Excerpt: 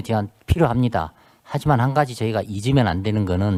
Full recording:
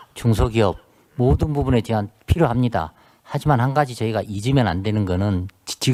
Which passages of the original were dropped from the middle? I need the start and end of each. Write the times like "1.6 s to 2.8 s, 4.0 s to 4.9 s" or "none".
none